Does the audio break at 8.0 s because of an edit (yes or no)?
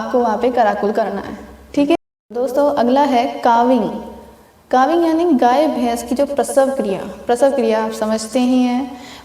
no